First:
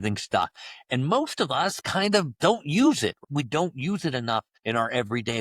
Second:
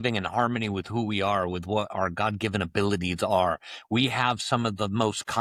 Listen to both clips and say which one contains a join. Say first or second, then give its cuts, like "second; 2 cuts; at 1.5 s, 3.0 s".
first; 1 cut; at 4.5 s